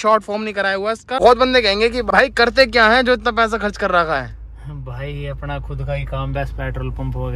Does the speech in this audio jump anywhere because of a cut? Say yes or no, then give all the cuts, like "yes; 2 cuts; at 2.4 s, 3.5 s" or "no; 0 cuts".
yes; 2 cuts; at 1.2 s, 2.1 s